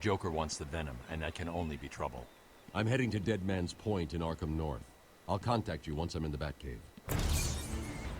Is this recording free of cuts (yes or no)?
yes